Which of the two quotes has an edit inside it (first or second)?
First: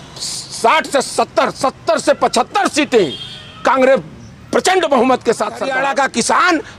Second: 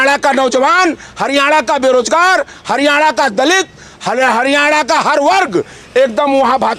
first